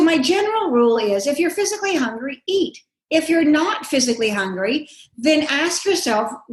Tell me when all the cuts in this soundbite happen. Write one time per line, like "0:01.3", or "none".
none